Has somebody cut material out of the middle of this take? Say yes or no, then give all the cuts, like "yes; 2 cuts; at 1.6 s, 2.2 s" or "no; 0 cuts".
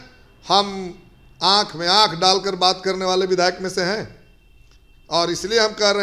no; 0 cuts